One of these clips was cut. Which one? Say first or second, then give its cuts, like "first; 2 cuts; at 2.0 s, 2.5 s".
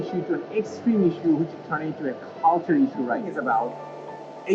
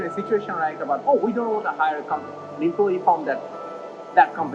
first; 1 cut; at 3.3 s